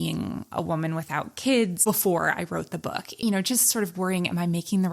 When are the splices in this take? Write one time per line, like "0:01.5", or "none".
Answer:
0:01.8
0:03.2